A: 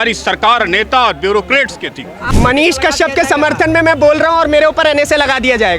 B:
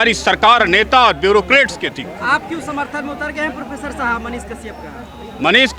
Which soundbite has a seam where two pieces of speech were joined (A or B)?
A